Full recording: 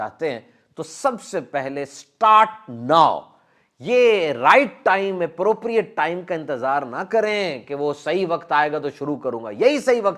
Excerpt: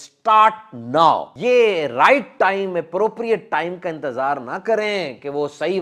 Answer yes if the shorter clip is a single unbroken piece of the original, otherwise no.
no